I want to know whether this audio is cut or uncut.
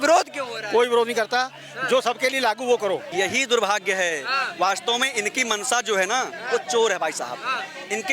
cut